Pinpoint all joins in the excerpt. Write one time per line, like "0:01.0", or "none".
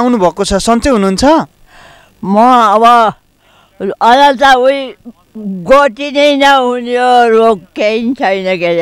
none